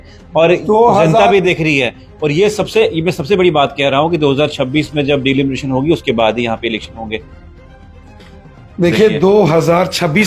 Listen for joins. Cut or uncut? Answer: uncut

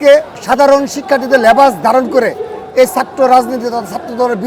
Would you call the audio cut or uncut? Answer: uncut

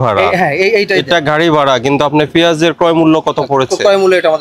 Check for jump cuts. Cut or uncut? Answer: uncut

